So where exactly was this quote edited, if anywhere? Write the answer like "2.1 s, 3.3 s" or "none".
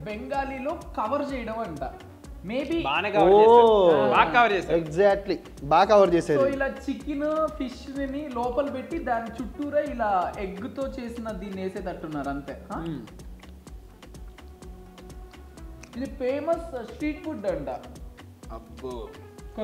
none